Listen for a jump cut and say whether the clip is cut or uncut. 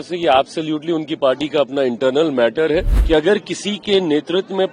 cut